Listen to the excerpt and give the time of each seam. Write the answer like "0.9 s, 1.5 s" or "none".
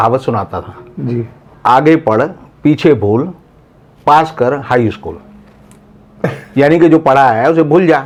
none